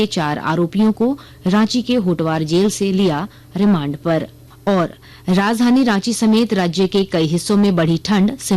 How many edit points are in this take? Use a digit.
0